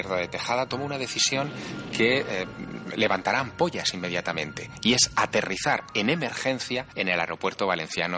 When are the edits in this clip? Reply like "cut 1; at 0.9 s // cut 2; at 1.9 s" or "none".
cut 1; at 6.9 s